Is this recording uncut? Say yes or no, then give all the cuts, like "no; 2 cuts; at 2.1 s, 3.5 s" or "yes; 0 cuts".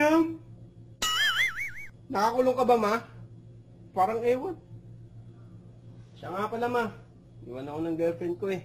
yes; 0 cuts